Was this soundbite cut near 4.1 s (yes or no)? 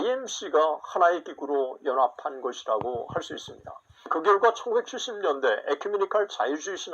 yes